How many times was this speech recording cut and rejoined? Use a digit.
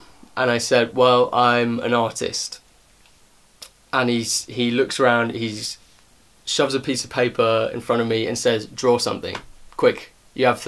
0